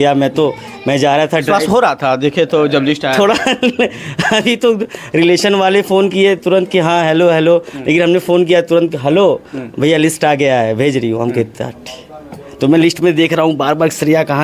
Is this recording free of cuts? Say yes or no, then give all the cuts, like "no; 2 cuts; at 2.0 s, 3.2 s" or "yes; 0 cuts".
yes; 0 cuts